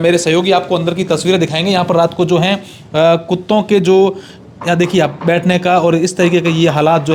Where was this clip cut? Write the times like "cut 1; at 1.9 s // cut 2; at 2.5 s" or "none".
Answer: none